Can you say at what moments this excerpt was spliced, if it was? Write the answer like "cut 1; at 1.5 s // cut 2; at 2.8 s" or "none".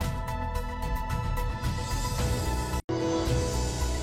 none